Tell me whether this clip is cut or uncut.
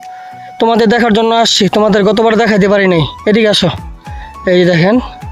uncut